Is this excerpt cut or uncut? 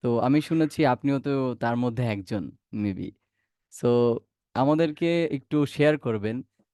uncut